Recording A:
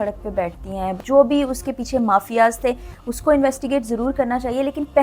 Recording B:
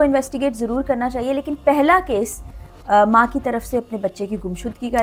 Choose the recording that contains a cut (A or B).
A